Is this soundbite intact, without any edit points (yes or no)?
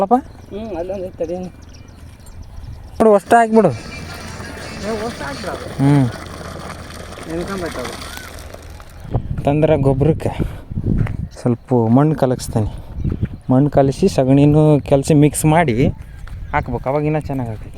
no